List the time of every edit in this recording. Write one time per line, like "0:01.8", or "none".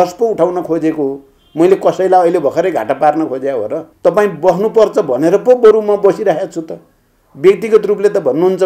0:03.8